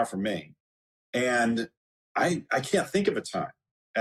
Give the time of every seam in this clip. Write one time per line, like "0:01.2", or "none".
none